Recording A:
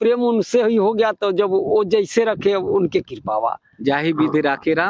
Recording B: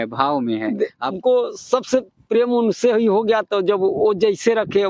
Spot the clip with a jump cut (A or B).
B